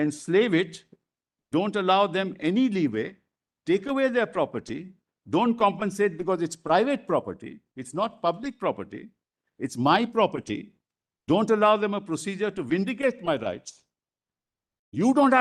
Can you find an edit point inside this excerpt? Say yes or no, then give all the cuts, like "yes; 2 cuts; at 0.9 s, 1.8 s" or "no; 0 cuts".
no; 0 cuts